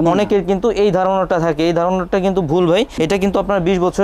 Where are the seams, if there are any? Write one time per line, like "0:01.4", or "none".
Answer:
none